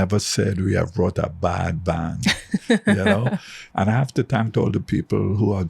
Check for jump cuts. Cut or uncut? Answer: cut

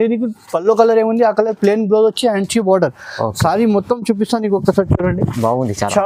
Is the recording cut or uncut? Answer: uncut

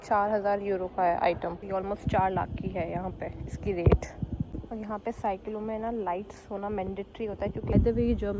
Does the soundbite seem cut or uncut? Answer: cut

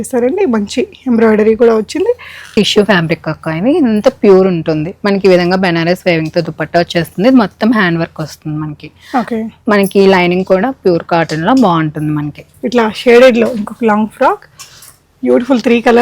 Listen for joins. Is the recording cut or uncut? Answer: cut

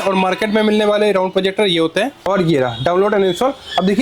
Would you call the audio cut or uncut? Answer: cut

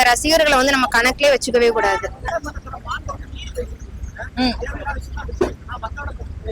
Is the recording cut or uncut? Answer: cut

